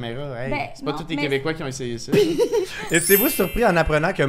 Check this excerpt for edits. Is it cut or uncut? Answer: cut